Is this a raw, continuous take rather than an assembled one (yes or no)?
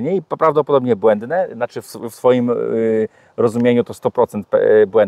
yes